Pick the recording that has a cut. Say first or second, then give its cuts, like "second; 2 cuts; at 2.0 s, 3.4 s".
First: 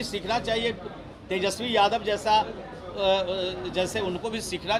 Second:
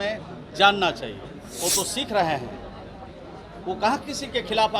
second; 1 cut; at 1.3 s